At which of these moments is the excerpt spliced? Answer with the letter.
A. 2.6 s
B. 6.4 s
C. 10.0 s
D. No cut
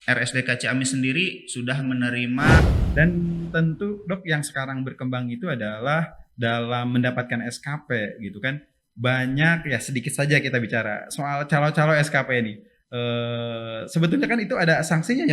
A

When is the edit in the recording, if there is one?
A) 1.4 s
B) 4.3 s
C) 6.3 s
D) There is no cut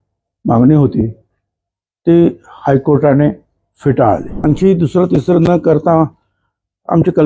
B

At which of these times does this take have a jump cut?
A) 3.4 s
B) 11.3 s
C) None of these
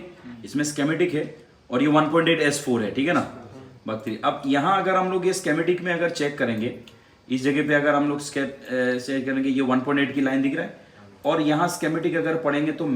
C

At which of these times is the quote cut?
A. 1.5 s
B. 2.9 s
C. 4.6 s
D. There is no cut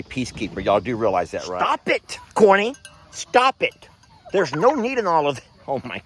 A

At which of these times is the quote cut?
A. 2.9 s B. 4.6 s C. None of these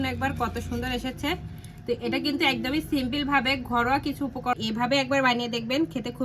B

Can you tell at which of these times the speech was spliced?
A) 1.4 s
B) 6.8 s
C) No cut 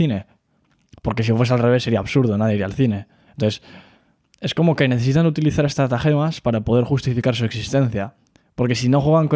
C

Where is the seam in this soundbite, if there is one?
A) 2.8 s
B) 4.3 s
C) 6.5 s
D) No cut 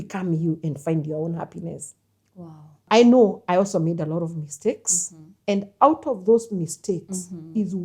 A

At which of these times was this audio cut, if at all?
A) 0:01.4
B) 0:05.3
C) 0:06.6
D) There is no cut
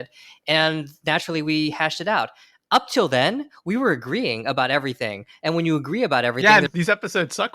C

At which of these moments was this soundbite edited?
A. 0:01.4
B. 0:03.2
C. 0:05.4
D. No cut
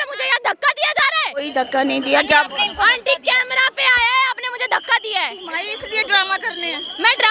A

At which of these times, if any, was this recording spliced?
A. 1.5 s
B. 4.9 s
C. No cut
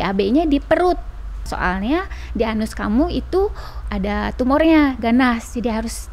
A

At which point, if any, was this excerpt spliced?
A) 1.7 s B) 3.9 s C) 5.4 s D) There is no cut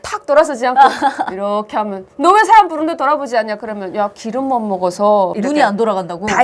C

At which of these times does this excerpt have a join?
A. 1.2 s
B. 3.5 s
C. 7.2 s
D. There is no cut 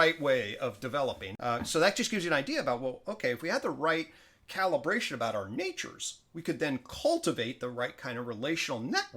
A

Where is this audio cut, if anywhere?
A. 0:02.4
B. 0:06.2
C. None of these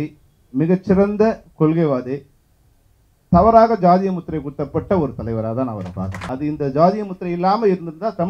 B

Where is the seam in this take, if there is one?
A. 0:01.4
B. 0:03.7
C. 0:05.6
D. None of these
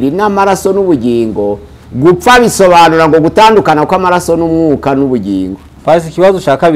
C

